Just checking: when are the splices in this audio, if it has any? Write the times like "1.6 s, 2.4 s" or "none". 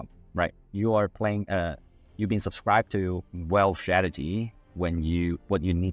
3.3 s